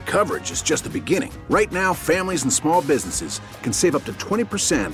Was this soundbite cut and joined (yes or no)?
no